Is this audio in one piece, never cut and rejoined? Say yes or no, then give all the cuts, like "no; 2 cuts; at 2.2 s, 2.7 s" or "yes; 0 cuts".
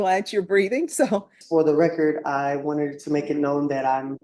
no; 1 cut; at 1.4 s